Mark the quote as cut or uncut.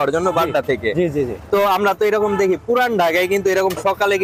uncut